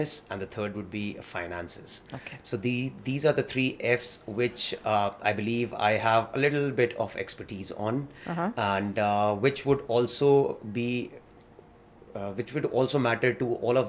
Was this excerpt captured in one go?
yes; 0 cuts

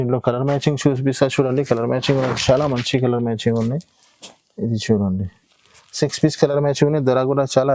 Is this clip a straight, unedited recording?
yes; 0 cuts

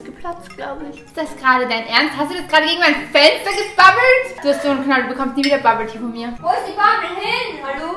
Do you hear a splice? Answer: no; 0 cuts

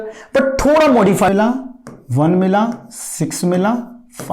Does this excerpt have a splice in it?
yes; 1 cut; at 1.3 s

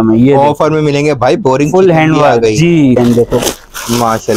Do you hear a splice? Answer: yes; 1 cut; at 3.0 s

